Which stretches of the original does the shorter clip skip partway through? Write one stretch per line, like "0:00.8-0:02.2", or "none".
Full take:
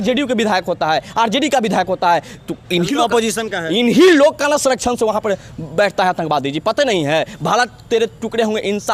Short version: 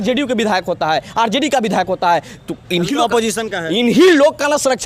none